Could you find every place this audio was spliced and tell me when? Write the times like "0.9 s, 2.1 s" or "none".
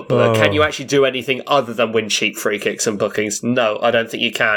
none